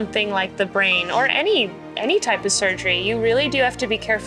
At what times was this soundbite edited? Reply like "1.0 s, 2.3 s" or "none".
none